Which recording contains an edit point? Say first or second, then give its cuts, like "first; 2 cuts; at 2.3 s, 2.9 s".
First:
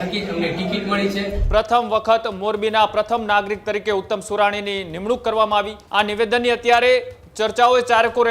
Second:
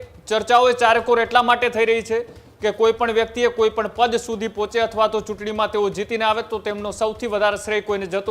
first; 2 cuts; at 1.4 s, 5.8 s